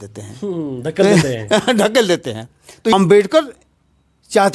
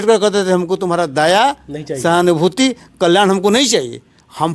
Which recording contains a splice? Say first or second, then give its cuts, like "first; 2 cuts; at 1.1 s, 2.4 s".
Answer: first; 1 cut; at 2.9 s